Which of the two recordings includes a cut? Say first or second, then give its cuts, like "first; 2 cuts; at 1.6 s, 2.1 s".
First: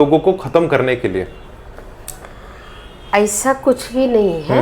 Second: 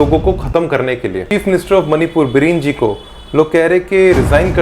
second; 1 cut; at 1.2 s